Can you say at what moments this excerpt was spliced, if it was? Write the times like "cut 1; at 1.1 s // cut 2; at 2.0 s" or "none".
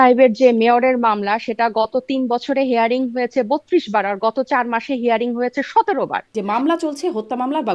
cut 1; at 6.3 s